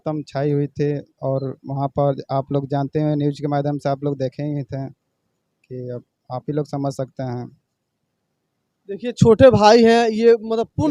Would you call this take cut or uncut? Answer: uncut